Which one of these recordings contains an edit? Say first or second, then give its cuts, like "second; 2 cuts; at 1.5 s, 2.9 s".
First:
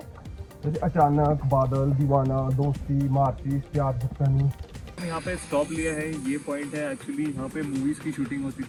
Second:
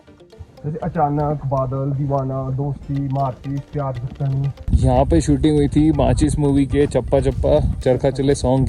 second; 1 cut; at 4.6 s